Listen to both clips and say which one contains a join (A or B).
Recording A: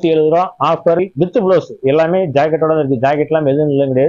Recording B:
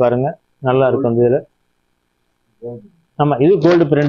A